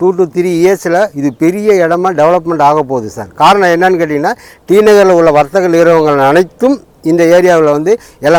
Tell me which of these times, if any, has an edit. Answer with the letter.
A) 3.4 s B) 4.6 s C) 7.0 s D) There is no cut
D